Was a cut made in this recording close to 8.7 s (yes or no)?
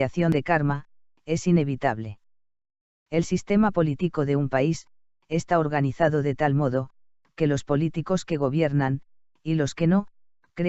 yes